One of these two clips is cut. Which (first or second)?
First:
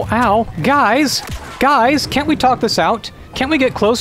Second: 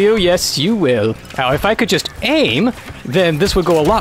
second